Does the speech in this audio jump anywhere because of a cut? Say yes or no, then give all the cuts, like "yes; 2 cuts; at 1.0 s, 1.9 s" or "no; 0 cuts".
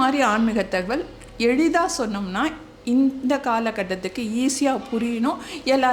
no; 0 cuts